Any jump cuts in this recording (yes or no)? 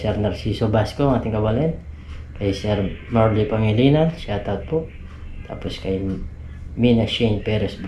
no